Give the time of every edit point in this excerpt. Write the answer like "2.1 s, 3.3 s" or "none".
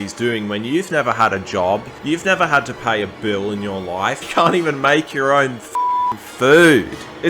1.9 s, 4.2 s